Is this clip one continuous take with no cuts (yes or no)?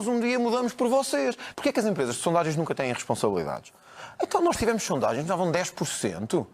no